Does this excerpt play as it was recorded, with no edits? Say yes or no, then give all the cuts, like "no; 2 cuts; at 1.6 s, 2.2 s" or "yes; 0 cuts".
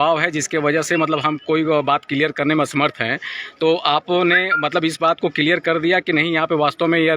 yes; 0 cuts